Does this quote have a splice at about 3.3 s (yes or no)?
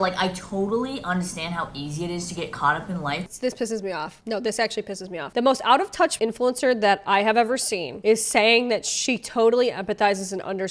yes